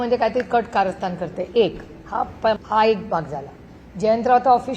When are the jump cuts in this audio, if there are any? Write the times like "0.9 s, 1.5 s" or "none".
2.6 s